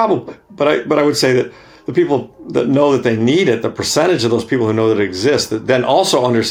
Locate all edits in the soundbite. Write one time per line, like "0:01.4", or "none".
none